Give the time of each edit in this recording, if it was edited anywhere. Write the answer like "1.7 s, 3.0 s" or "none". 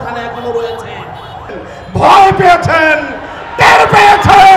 1.5 s